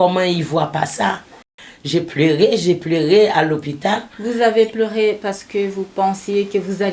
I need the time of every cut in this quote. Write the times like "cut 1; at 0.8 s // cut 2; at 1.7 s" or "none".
cut 1; at 1.6 s

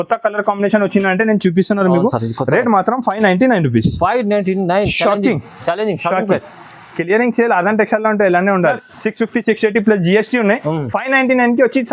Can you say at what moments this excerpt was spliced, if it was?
none

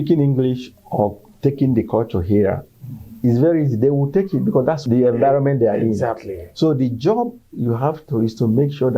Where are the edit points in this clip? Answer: none

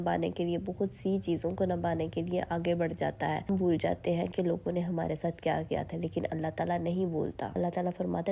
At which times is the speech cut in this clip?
none

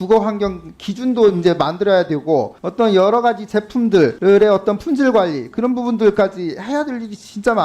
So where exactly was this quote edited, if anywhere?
cut 1; at 2.6 s // cut 2; at 4.2 s

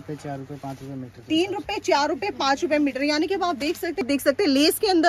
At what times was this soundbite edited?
cut 1; at 4.1 s

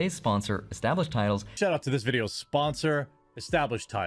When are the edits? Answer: cut 1; at 1.5 s

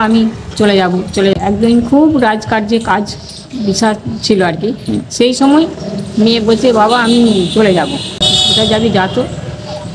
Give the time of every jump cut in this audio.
cut 1; at 1.3 s // cut 2; at 8.3 s

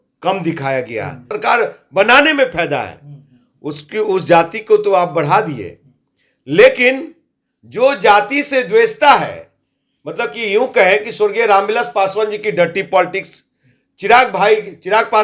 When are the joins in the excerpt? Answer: cut 1; at 1.3 s

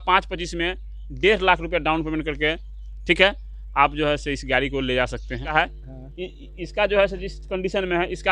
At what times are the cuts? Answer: cut 1; at 5.5 s

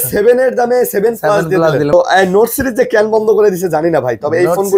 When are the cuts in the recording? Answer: cut 1; at 1.9 s

